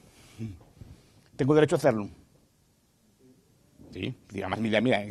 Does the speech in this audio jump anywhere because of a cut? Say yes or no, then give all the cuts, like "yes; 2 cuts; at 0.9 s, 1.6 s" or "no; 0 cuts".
no; 0 cuts